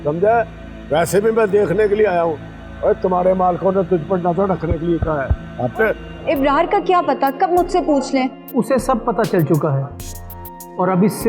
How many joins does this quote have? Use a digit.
1